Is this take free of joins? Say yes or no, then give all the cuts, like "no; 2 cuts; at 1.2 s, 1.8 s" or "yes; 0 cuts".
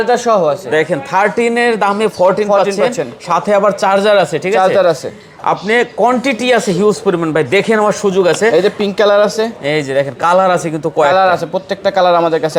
yes; 0 cuts